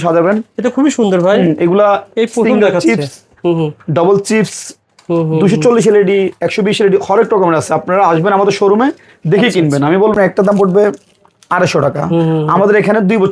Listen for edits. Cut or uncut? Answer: cut